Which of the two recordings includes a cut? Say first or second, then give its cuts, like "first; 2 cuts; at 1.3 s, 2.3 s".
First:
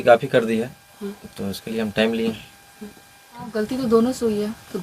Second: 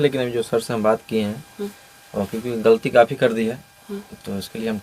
first; 1 cut; at 3.4 s